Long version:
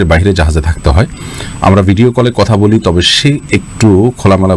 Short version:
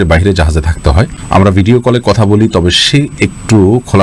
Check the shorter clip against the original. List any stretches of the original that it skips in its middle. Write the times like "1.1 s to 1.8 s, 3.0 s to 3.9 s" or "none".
1.2 s to 1.5 s

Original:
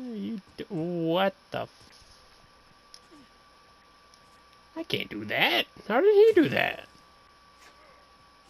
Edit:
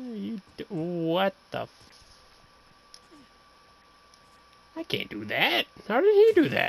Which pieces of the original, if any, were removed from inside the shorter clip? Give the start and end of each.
none

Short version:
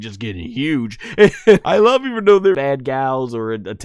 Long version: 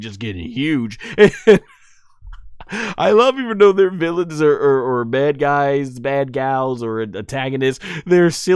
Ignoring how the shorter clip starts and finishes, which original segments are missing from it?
1.6 s to 3.0 s, 3.9 s to 6.1 s

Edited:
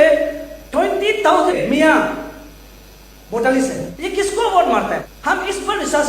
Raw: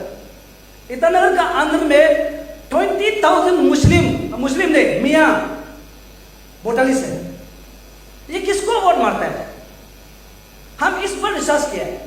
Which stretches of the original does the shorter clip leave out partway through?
3.5 s to 4.9 s, 7.2 s to 8.2 s, 9.4 s to 10.7 s

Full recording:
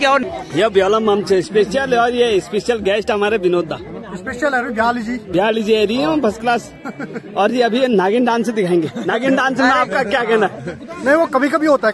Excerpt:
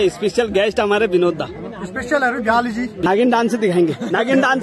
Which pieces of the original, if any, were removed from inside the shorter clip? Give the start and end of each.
5.4 s to 8.0 s

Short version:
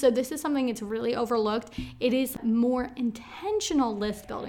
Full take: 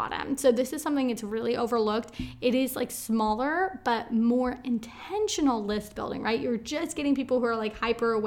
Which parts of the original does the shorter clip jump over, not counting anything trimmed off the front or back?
2.8 s to 4.0 s

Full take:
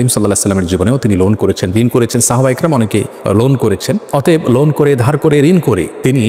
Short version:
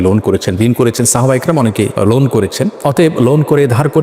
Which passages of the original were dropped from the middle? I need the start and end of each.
3.1 s to 3.2 s

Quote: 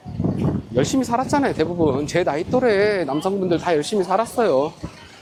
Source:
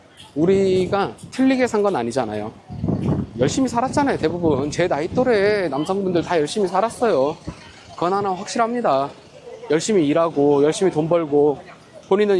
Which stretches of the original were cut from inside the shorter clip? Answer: none

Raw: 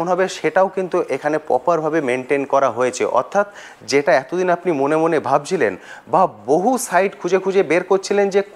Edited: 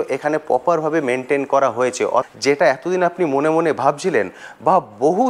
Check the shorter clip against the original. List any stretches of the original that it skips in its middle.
3.3 s to 3.7 s

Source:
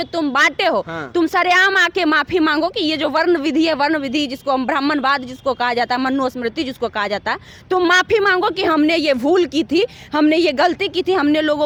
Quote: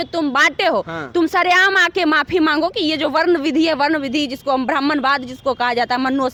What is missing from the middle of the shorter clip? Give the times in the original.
none

